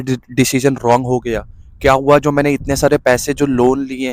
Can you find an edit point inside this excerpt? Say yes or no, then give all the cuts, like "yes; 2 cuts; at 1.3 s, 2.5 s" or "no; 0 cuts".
no; 0 cuts